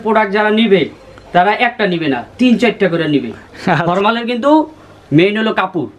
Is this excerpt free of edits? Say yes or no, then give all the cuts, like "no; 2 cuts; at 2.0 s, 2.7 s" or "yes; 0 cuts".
no; 1 cut; at 3.8 s